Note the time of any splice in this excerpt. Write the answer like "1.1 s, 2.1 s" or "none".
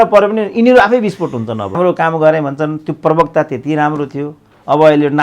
1.8 s